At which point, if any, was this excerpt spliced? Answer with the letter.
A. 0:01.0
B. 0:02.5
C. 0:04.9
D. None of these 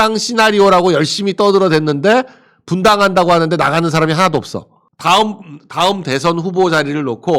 C